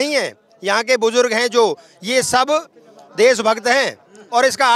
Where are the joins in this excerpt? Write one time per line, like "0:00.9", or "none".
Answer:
none